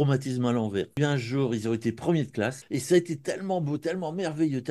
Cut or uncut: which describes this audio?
cut